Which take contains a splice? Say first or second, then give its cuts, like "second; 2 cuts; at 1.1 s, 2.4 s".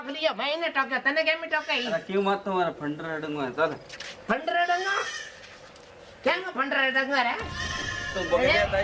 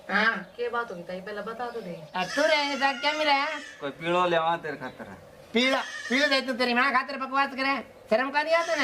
second; 1 cut; at 2.0 s